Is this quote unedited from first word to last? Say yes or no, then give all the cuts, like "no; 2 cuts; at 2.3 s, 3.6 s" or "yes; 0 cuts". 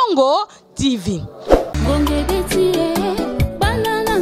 no; 1 cut; at 1.6 s